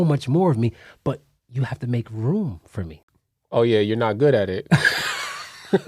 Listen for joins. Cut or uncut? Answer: cut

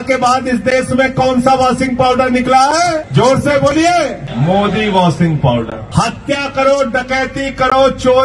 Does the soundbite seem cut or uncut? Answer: cut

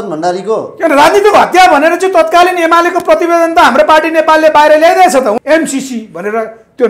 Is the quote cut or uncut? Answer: cut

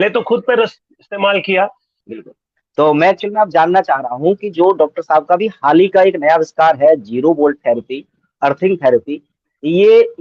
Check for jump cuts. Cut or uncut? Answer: cut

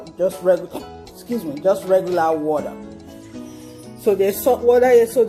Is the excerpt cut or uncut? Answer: uncut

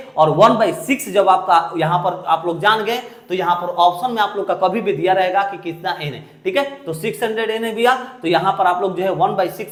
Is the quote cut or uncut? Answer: uncut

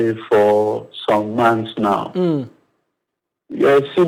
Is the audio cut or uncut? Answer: uncut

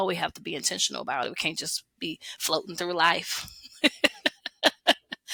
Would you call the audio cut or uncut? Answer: uncut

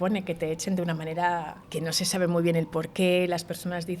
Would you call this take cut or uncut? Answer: cut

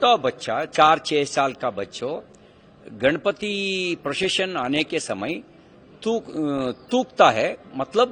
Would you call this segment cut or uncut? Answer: uncut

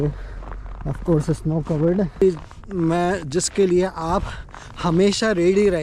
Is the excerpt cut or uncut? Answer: cut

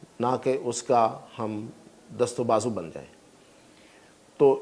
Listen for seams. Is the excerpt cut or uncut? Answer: uncut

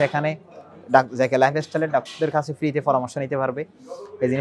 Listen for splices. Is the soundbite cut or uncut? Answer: uncut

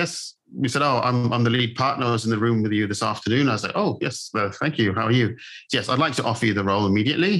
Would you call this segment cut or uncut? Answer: uncut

